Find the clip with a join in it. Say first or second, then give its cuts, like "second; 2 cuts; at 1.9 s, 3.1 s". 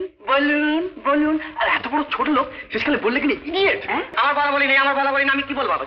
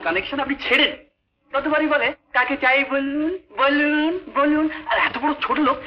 first; 1 cut; at 4.1 s